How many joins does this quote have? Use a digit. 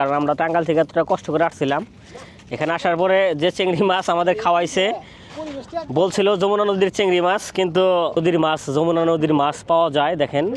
1